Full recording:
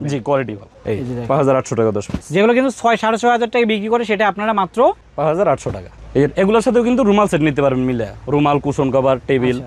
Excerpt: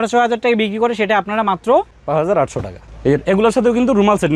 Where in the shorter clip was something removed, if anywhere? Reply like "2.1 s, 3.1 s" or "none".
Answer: none

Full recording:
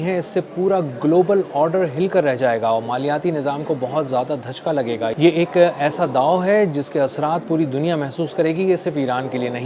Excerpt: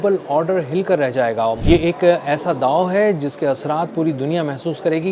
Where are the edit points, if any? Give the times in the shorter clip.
1.6 s

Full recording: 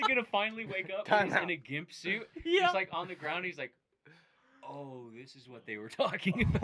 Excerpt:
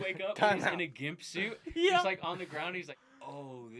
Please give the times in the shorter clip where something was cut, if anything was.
2.9 s

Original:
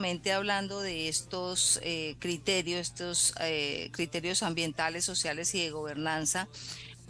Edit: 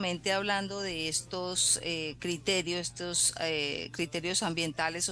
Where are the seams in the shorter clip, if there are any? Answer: none

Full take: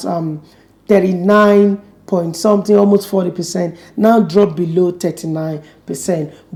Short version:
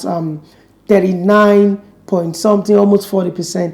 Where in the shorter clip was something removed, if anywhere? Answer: none

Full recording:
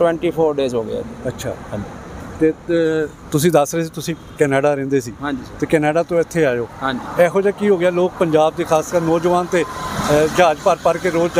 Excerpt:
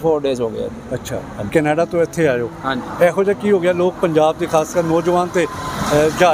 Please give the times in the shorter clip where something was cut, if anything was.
1.5 s

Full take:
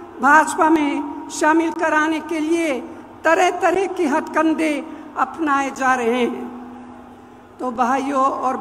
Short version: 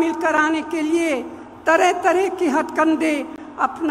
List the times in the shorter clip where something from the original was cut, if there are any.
none

